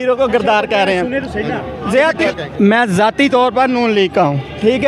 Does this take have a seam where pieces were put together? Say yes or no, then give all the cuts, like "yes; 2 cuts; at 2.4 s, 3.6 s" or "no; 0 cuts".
yes; 1 cut; at 2.2 s